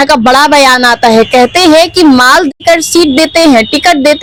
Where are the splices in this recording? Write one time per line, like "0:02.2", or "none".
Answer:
none